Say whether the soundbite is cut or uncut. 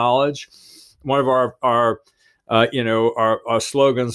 uncut